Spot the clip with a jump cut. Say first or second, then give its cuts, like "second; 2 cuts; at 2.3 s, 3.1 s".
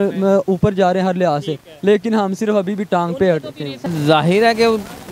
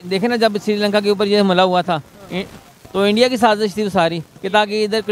first; 1 cut; at 3.8 s